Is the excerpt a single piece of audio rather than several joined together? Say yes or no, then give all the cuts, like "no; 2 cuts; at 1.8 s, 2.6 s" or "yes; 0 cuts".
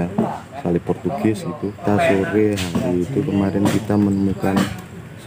no; 1 cut; at 1.8 s